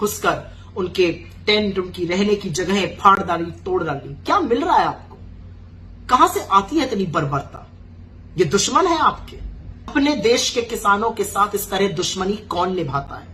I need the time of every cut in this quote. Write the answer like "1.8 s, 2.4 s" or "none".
9.9 s